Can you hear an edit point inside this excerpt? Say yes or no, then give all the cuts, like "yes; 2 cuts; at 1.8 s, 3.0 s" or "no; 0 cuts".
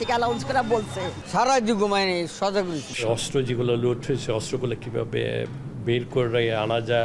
yes; 2 cuts; at 1.2 s, 2.9 s